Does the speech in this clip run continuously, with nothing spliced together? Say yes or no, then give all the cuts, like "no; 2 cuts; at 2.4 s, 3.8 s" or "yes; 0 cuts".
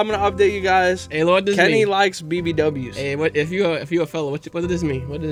yes; 0 cuts